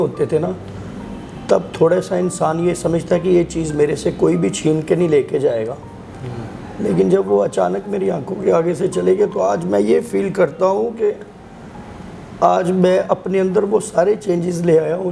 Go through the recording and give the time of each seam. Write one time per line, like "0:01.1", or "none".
none